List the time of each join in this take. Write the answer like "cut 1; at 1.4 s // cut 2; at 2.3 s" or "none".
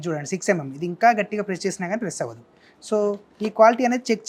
none